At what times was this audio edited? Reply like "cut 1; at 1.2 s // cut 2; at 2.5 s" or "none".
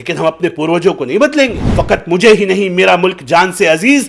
cut 1; at 1.6 s